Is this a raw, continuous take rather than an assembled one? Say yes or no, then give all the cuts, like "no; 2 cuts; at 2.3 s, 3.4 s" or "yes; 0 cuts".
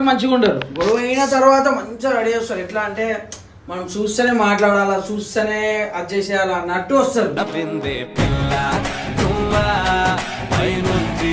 yes; 0 cuts